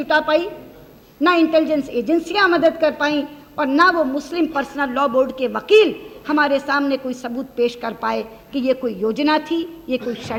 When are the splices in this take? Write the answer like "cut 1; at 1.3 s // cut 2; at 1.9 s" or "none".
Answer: none